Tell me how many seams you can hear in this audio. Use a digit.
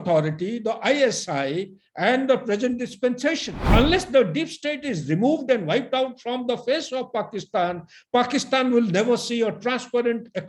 1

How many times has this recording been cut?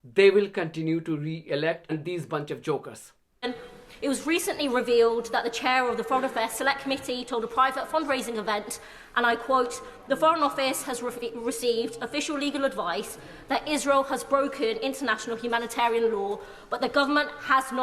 2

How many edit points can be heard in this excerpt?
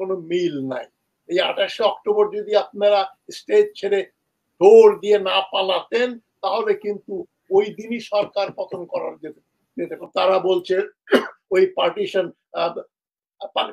1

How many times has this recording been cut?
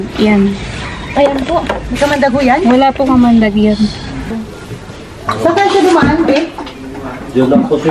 1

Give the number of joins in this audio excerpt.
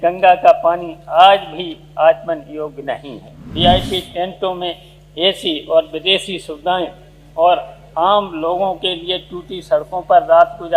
1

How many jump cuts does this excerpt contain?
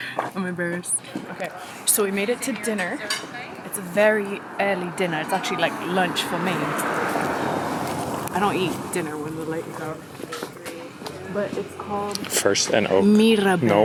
0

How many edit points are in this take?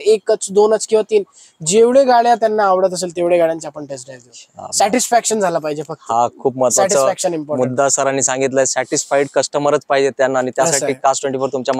0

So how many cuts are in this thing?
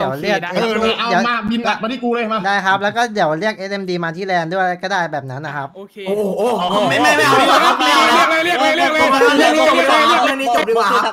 0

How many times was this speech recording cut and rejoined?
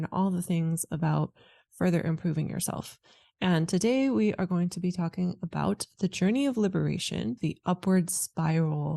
1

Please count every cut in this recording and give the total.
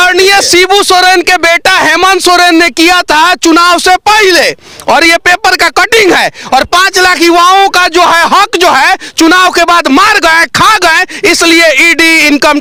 0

